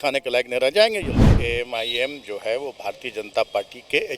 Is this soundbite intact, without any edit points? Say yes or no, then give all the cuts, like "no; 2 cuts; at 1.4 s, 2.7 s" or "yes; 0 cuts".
no; 1 cut; at 1.4 s